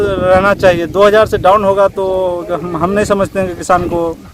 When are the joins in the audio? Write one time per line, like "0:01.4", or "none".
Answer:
none